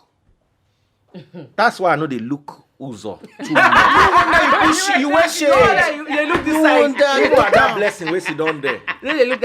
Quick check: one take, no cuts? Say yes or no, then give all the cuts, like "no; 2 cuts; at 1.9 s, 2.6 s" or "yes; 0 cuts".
yes; 0 cuts